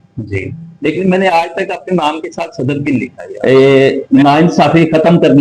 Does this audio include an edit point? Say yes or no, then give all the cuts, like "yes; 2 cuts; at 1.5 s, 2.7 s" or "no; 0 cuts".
yes; 1 cut; at 3.2 s